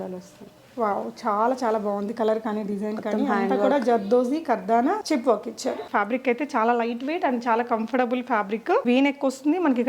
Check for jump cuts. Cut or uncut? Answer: cut